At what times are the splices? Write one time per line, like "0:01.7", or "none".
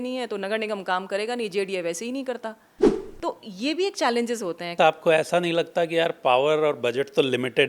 0:04.7